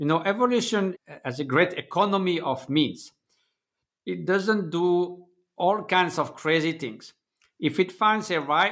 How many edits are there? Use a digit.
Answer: 1